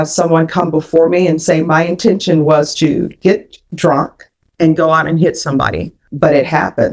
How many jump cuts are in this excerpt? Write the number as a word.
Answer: one